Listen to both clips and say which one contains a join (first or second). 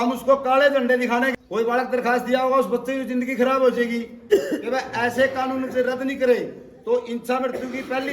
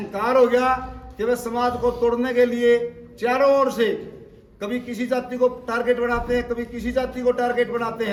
first